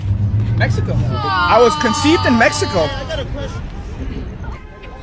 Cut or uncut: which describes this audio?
uncut